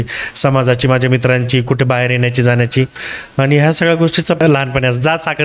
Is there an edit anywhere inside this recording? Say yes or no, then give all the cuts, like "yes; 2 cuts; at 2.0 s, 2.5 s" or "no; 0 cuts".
yes; 1 cut; at 4.4 s